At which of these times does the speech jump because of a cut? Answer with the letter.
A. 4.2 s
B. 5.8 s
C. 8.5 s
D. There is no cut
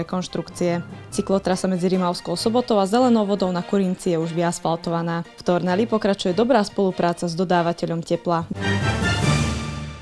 C